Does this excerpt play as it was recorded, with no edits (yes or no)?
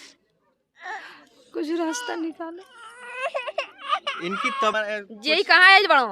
no